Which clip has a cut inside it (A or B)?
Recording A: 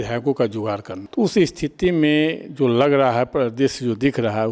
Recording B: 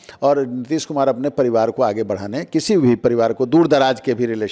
A